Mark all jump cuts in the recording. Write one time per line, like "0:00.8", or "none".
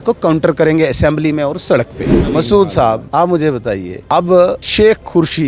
0:02.2
0:03.0
0:03.9
0:04.6